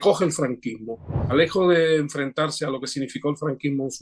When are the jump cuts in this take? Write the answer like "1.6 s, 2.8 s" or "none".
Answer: 1.3 s